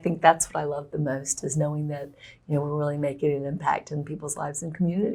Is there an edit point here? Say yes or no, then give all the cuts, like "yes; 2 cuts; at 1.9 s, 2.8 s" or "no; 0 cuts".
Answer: no; 0 cuts